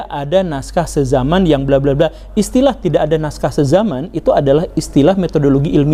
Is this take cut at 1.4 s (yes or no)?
no